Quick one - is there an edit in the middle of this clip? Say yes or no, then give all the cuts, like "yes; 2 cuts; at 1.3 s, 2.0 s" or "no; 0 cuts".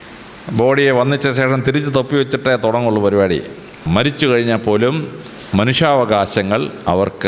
yes; 1 cut; at 3.8 s